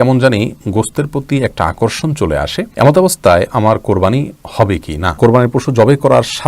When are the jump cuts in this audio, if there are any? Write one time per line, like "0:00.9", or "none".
0:02.7
0:05.2